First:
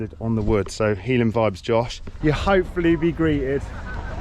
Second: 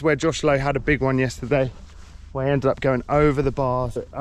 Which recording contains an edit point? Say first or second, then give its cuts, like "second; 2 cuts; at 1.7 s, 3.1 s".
first; 1 cut; at 2.0 s